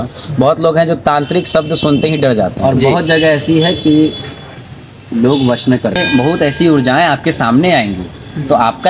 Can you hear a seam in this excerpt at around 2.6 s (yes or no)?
yes